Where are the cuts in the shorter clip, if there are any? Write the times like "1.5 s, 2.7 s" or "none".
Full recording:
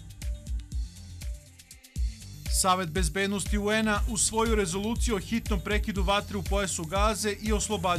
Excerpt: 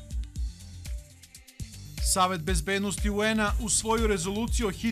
1.6 s